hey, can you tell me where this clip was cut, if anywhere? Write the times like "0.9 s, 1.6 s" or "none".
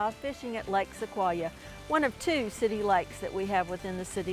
none